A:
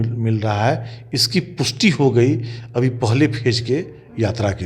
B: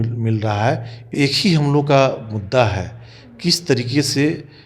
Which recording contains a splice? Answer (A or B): B